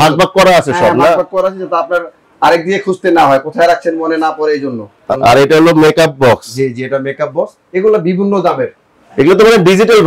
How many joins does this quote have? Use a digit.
1